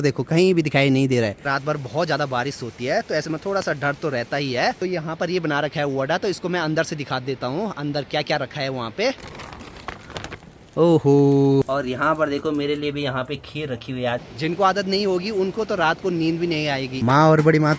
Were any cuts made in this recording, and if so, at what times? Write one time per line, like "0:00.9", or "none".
0:01.5
0:04.8
0:09.3
0:11.7
0:14.3
0:16.9